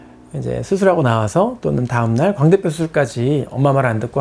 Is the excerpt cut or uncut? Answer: uncut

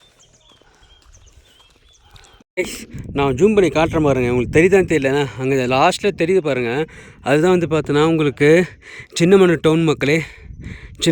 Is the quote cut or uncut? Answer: cut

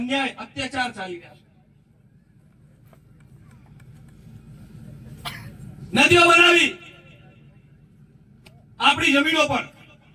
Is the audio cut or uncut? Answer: uncut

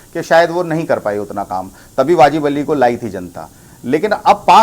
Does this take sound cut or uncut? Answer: uncut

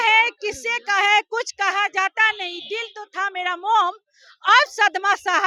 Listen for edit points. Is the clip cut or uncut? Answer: uncut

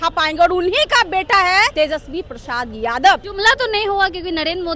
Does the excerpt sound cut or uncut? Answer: cut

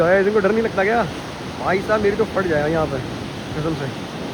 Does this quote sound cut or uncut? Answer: uncut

